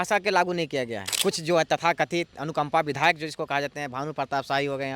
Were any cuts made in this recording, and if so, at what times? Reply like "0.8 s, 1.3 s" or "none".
1.0 s

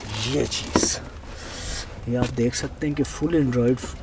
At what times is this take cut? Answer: none

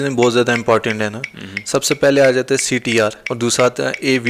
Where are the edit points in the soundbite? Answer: 3.2 s

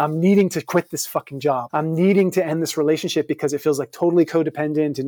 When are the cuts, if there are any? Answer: 1.7 s

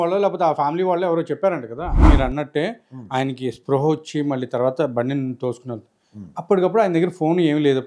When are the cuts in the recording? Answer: 2.0 s

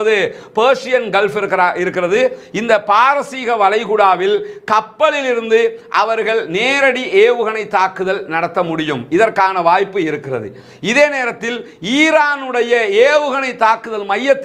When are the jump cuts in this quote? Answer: none

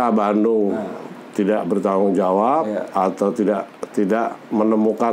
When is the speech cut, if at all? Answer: none

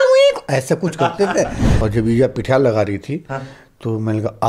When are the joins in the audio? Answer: 1.6 s

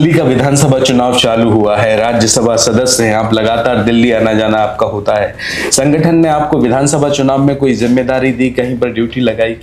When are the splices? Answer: none

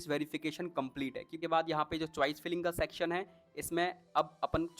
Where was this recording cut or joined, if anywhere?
1.4 s

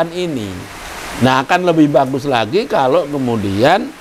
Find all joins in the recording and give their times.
none

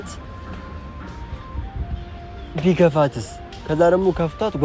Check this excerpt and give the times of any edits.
none

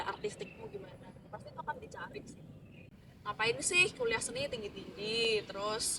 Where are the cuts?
2.9 s

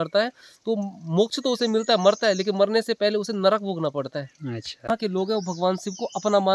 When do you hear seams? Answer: 4.9 s

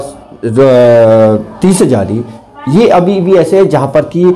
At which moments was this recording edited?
none

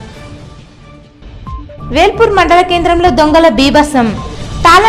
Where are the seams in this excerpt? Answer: none

